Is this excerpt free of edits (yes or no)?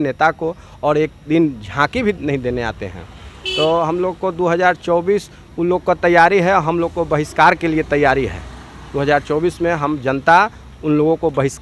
yes